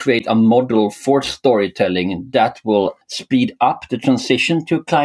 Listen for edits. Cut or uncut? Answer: cut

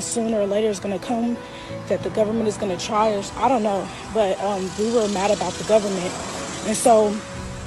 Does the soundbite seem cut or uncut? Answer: cut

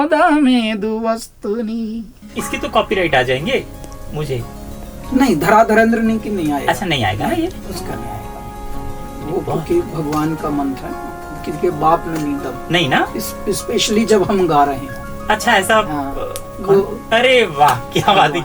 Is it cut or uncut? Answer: cut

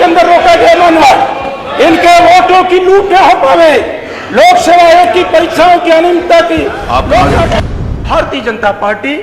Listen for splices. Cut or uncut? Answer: cut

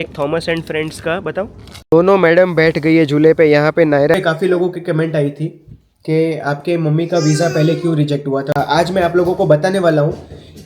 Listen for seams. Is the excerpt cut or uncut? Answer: cut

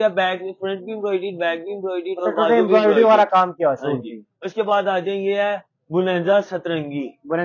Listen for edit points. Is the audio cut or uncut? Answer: uncut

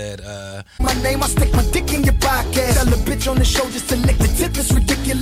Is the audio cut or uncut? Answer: uncut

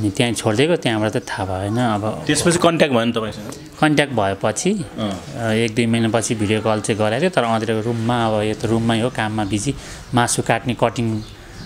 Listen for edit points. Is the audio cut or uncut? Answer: uncut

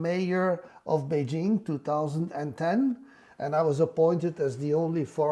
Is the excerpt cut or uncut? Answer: uncut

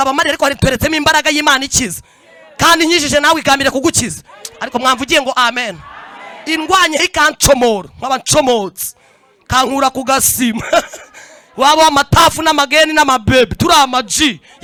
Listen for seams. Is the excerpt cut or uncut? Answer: uncut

